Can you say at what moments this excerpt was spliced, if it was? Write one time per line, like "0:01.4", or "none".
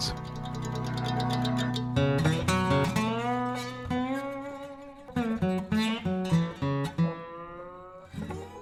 none